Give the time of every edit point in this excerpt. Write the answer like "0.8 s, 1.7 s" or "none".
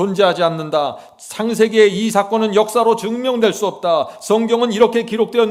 none